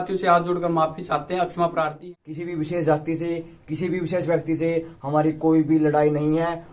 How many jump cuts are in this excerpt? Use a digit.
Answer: 1